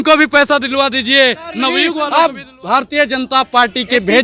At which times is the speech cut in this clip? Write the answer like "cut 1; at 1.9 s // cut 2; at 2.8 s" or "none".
cut 1; at 1.9 s